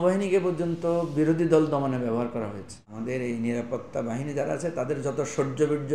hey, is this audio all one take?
no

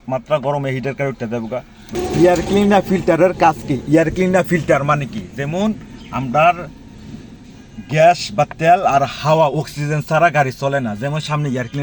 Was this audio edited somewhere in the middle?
yes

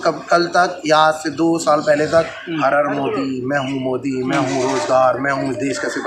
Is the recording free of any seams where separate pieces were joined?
yes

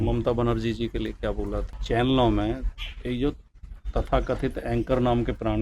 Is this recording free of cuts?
no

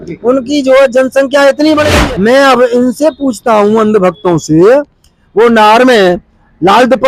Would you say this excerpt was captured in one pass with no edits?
no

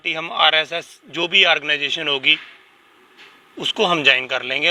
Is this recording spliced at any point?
no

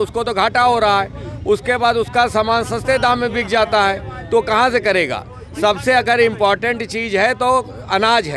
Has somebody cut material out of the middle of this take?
no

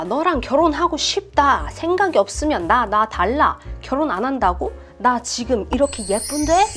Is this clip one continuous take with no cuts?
yes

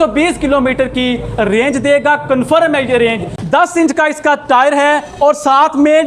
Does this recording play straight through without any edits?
no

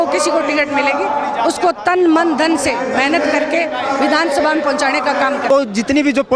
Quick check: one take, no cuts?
no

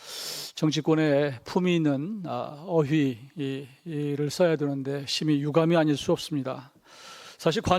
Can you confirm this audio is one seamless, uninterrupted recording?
yes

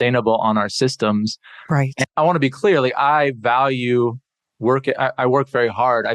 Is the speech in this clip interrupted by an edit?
no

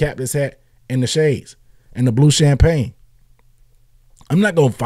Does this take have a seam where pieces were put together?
no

